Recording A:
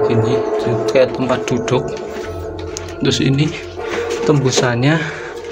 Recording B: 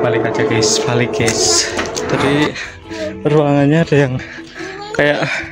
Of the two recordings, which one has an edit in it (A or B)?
B